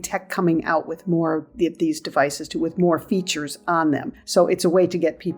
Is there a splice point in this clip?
yes; 1 cut; at 4.2 s

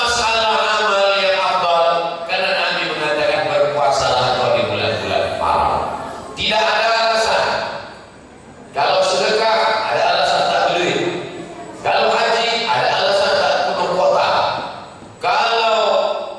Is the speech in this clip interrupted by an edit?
no; 0 cuts

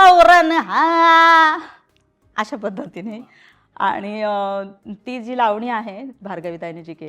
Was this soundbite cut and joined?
no; 0 cuts

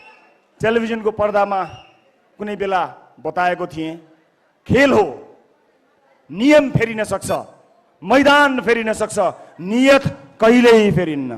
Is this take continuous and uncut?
yes; 0 cuts

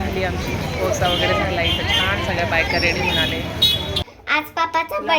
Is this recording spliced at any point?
yes; 1 cut; at 4.0 s

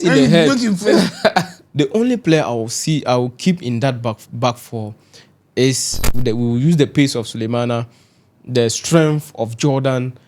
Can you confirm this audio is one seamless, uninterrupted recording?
no; 2 cuts; at 1.6 s, 5.9 s

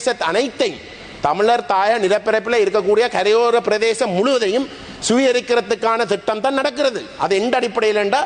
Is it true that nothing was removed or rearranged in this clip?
yes; 0 cuts

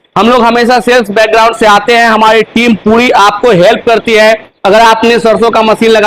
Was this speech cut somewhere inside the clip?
no; 0 cuts

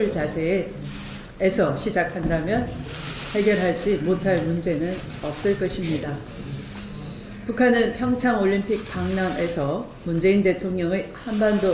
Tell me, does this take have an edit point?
no; 0 cuts

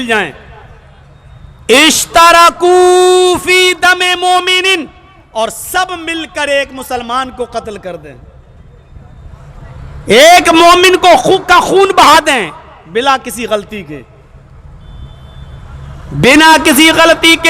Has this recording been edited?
no; 0 cuts

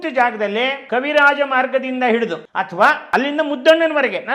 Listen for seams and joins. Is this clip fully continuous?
no; 3 cuts; at 0.8 s, 2.5 s, 3.0 s

